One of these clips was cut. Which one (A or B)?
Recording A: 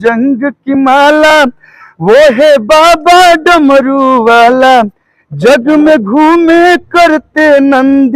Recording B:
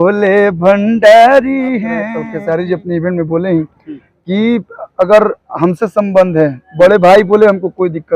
B